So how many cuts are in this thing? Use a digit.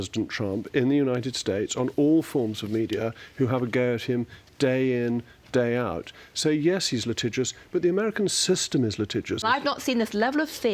1